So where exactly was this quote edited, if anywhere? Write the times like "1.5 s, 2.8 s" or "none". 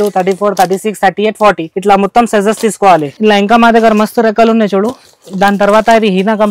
none

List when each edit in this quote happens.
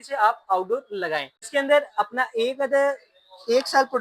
1.3 s

